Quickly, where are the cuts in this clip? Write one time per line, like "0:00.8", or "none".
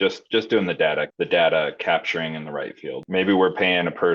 0:01.1
0:03.0

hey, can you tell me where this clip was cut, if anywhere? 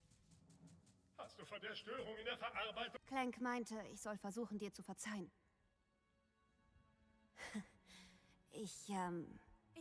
0:02.9

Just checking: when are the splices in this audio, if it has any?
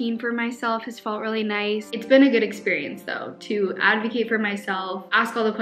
0:01.9

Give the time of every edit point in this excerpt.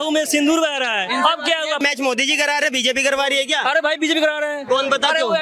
0:01.8

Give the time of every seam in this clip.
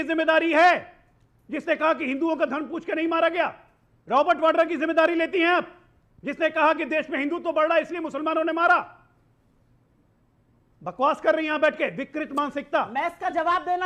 none

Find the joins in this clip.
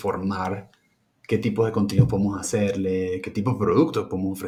none

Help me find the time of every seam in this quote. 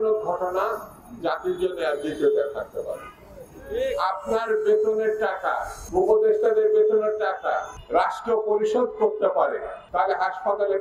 0:05.7
0:07.7
0:09.8

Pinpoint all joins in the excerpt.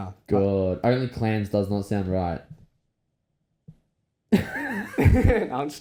none

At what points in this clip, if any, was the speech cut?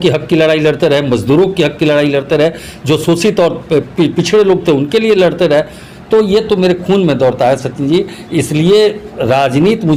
none

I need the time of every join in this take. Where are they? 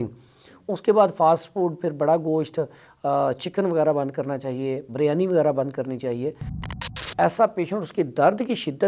0:06.8

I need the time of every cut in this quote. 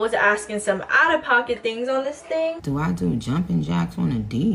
none

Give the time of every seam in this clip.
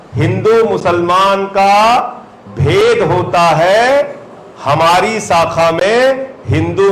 none

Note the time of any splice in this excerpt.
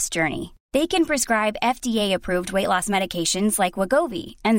none

